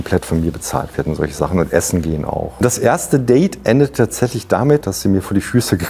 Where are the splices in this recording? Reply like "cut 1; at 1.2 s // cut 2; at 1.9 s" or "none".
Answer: cut 1; at 2.6 s // cut 2; at 4.9 s